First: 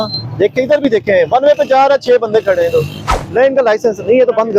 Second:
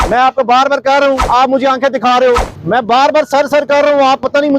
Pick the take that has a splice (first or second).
second